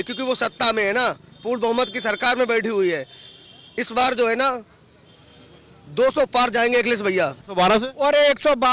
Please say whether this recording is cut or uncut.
cut